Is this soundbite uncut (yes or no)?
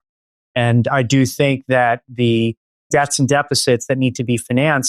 no